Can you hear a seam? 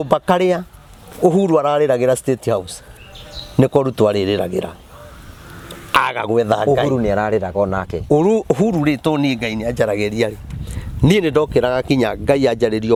no; 0 cuts

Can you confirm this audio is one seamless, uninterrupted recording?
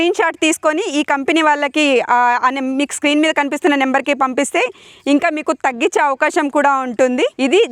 yes; 0 cuts

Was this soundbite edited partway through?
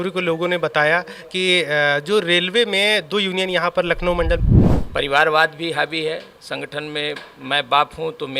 yes; 1 cut; at 4.4 s

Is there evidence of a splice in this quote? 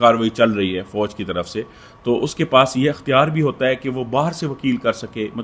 no; 0 cuts

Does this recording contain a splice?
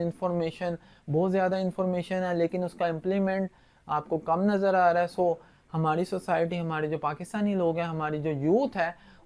no; 0 cuts

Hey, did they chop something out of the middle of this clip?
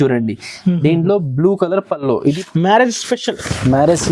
yes; 1 cut; at 2.4 s

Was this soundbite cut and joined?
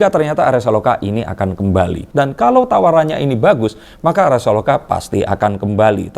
yes; 1 cut; at 2.1 s

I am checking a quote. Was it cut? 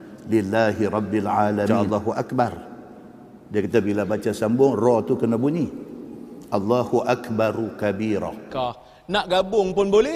yes; 2 cuts; at 1.8 s, 8.4 s

